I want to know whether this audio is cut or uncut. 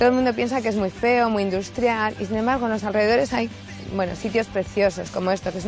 uncut